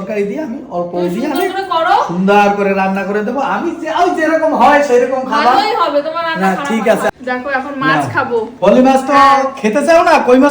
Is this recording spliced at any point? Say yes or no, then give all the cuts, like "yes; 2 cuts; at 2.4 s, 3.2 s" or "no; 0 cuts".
yes; 1 cut; at 7.1 s